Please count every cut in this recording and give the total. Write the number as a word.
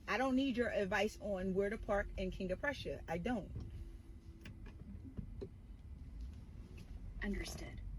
zero